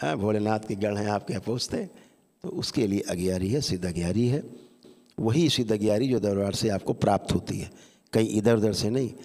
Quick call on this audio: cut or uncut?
uncut